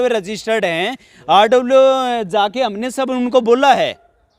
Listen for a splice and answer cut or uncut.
uncut